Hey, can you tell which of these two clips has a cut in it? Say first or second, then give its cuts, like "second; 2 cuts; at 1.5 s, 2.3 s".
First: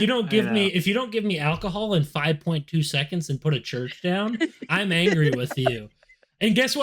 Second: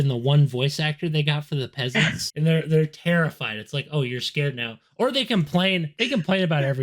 second; 1 cut; at 2.2 s